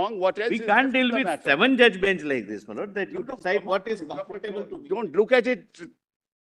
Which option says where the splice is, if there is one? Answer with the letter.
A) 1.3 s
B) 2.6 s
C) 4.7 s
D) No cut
C